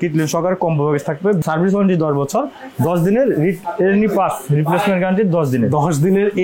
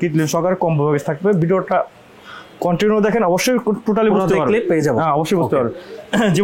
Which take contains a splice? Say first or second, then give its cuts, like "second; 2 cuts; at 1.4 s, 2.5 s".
first; 1 cut; at 1.4 s